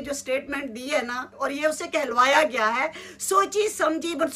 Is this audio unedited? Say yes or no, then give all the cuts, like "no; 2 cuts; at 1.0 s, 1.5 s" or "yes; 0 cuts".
no; 1 cut; at 1.3 s